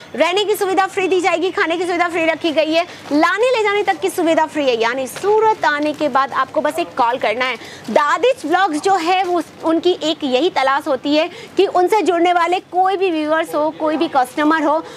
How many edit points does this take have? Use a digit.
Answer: 0